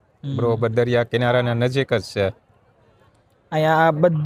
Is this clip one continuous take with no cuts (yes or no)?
yes